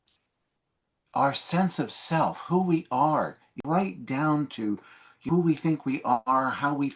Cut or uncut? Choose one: cut